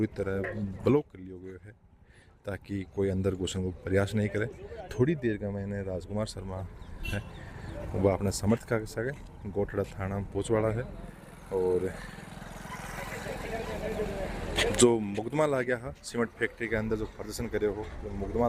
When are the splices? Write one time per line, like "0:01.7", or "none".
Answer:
none